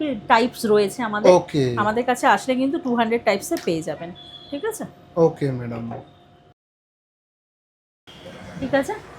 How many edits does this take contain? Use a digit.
0